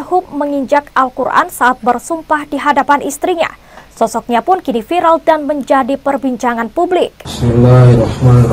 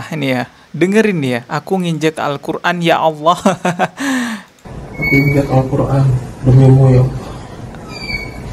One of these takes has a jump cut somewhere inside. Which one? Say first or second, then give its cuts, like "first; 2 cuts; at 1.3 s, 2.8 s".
first; 1 cut; at 7.2 s